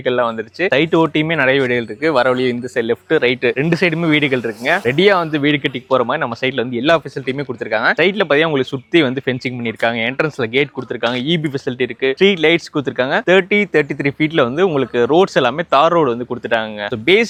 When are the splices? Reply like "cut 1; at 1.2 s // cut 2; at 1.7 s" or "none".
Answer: none